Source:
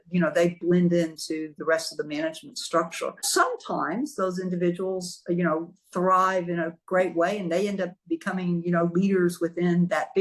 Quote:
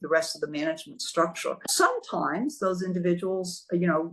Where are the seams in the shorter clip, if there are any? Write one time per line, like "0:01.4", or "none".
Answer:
none